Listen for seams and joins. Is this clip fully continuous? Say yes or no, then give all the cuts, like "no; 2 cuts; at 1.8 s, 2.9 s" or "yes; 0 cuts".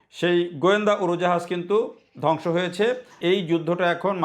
no; 1 cut; at 3.2 s